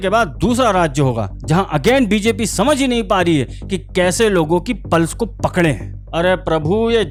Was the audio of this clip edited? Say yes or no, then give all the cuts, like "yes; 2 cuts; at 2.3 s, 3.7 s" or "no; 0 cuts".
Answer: no; 0 cuts